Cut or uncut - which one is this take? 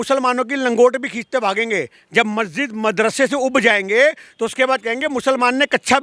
uncut